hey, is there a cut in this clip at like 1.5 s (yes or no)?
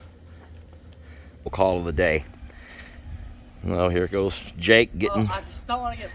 yes